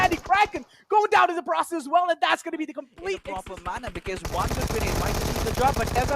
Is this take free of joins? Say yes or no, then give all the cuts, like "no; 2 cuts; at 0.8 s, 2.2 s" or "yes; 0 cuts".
no; 1 cut; at 3.3 s